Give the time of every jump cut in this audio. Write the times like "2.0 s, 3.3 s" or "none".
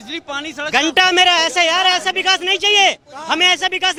none

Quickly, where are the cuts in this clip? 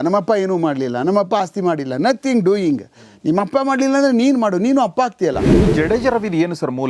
5.5 s

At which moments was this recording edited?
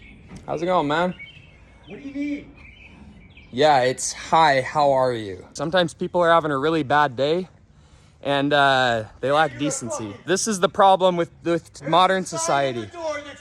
5.5 s, 10.1 s

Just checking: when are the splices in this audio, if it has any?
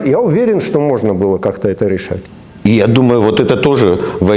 2.2 s

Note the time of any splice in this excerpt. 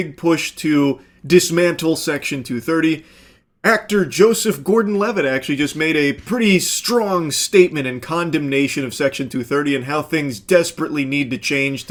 none

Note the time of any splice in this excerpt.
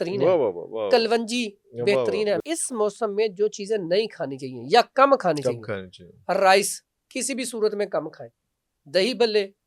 2.4 s

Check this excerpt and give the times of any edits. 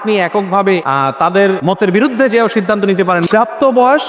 1.3 s, 3.2 s

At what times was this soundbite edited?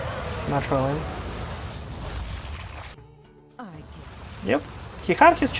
2.9 s

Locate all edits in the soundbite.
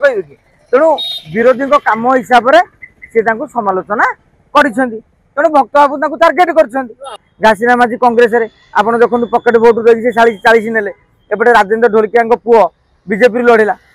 7.2 s

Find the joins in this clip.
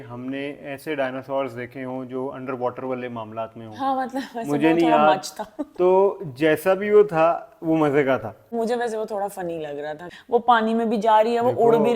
8.4 s, 10.1 s

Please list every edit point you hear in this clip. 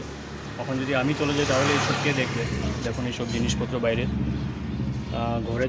none

